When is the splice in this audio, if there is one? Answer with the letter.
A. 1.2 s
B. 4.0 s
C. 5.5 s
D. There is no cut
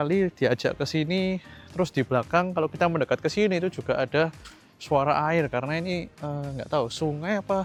D